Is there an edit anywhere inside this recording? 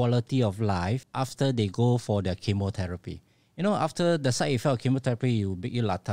yes; 1 cut; at 1.1 s

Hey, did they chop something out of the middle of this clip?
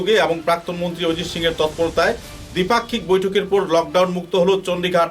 no; 0 cuts

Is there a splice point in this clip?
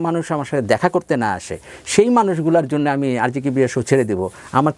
no; 0 cuts

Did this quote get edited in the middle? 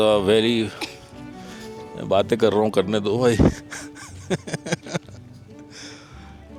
no; 0 cuts

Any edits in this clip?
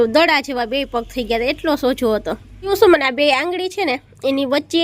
yes; 1 cut; at 2.7 s

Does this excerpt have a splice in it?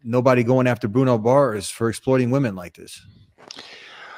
no; 0 cuts

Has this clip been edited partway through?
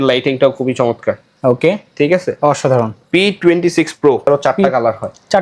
yes; 1 cut; at 4.3 s

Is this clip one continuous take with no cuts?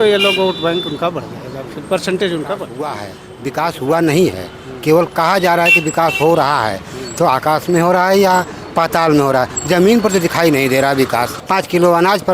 no; 2 cuts; at 3.0 s, 11.4 s

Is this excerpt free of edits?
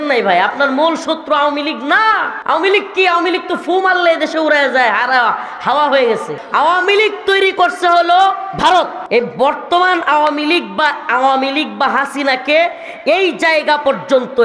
no; 3 cuts; at 2.3 s, 6.4 s, 9.0 s

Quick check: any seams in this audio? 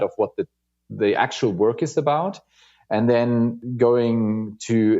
yes; 1 cut; at 3.6 s

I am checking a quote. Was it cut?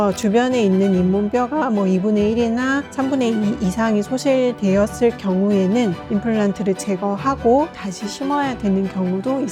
no; 0 cuts

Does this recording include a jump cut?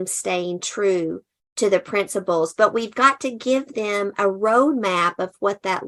no; 0 cuts

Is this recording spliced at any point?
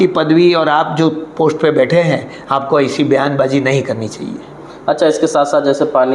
no; 0 cuts

